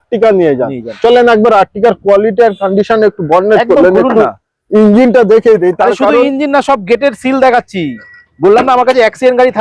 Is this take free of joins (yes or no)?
yes